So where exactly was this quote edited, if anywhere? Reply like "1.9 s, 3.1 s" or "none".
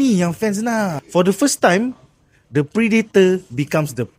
1.0 s